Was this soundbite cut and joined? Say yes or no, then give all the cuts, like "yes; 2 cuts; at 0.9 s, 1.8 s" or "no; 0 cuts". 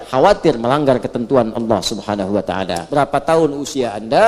yes; 1 cut; at 2.8 s